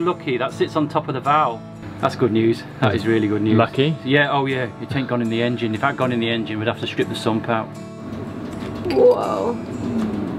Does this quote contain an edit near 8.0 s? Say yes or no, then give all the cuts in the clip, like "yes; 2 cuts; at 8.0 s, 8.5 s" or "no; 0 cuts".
yes; 2 cuts; at 1.6 s, 8.0 s